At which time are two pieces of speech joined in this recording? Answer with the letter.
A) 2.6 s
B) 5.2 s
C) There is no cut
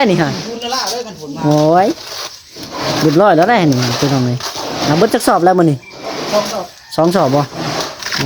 C